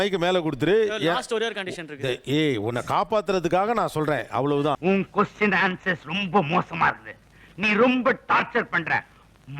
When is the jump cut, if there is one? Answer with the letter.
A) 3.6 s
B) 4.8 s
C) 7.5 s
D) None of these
D